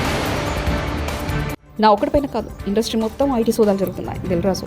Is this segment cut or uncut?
cut